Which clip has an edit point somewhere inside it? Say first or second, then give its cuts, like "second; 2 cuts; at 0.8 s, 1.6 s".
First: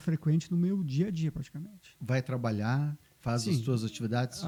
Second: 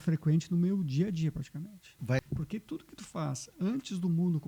second; 1 cut; at 2.2 s